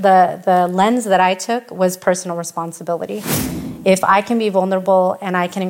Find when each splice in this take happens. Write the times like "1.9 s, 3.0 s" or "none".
3.4 s